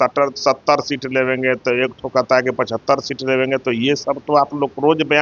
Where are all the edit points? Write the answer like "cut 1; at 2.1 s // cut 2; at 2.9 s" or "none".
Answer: none